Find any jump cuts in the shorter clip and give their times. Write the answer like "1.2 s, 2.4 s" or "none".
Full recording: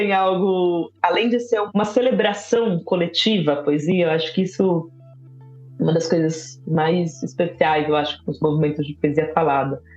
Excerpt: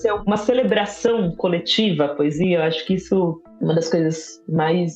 3.5 s